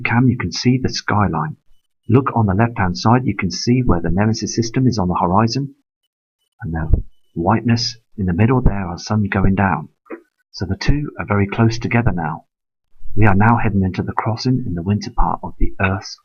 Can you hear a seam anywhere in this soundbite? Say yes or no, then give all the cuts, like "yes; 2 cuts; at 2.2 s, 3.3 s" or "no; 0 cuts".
yes; 1 cut; at 11.1 s